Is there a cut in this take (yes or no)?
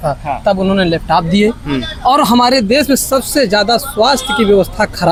no